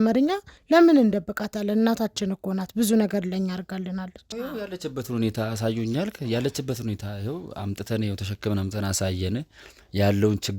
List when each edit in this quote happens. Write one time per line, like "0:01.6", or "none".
0:04.2